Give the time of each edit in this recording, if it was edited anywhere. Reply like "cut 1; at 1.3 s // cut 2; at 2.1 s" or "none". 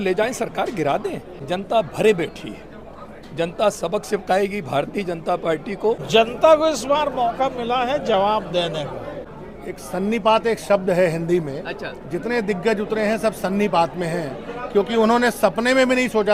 cut 1; at 1.4 s // cut 2; at 6.0 s // cut 3; at 9.3 s